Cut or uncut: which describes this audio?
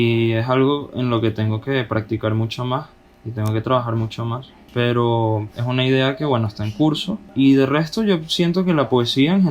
uncut